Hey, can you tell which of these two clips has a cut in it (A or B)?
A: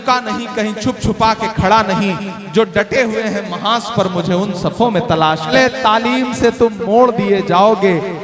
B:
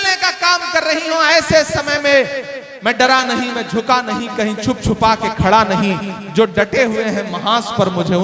A